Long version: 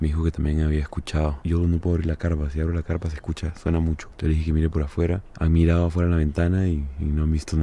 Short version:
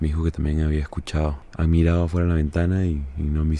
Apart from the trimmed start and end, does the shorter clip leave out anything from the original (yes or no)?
yes